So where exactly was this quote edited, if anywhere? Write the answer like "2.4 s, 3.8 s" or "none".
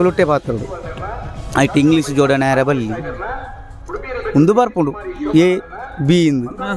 none